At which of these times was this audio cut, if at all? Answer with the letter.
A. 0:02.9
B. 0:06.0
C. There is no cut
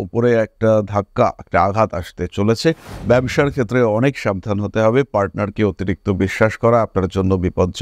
C